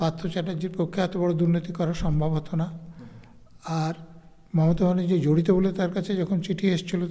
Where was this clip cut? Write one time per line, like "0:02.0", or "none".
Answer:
none